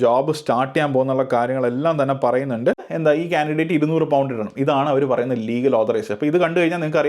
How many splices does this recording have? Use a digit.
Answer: 1